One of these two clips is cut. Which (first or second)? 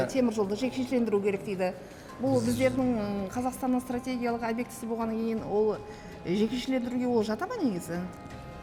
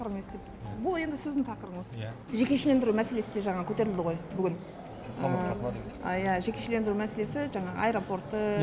second